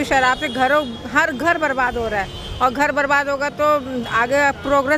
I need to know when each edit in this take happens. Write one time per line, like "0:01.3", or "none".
none